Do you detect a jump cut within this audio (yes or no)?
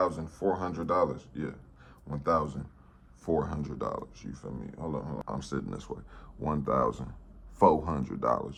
no